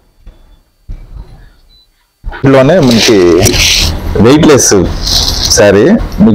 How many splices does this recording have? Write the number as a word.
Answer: one